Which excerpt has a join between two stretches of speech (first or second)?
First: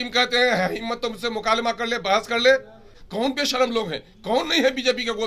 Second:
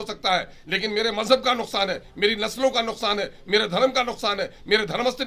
first